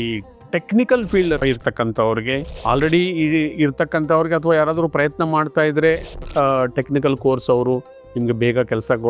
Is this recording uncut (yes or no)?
no